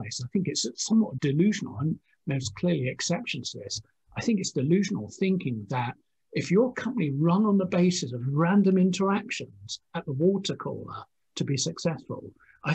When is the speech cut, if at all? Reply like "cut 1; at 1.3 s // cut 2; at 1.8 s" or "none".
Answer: cut 1; at 1.2 s